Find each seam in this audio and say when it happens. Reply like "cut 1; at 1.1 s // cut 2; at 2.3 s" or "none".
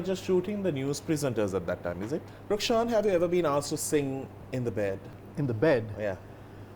cut 1; at 2.3 s // cut 2; at 4.4 s // cut 3; at 5.2 s